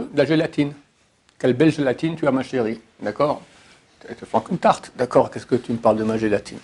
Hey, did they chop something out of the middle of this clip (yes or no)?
no